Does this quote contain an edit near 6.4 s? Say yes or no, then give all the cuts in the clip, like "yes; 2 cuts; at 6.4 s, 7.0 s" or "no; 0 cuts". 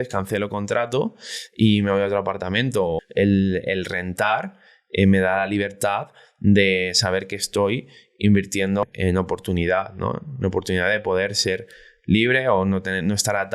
no; 2 cuts; at 3.0 s, 8.8 s